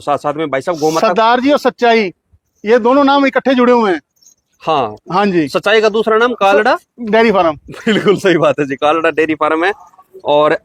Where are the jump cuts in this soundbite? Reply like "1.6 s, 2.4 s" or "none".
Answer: none